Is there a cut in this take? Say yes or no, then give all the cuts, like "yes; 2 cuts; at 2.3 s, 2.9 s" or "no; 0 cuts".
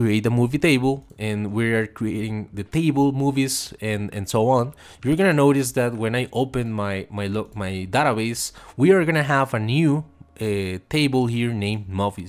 no; 0 cuts